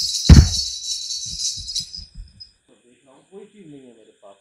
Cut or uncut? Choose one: cut